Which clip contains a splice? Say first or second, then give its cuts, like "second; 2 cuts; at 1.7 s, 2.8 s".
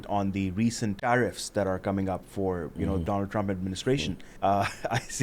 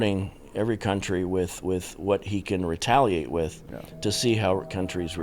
first; 3 cuts; at 1.0 s, 3.0 s, 4.2 s